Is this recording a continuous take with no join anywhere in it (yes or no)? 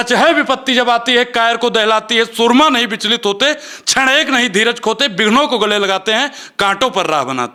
yes